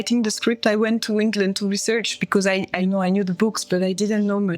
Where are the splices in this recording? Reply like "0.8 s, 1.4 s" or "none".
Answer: 2.8 s